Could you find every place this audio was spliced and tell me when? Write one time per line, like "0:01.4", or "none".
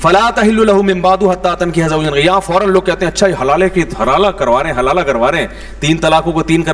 none